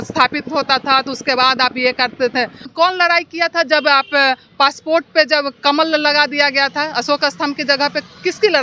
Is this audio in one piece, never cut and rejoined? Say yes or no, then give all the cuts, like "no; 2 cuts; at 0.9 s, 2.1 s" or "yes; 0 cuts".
no; 1 cut; at 2.7 s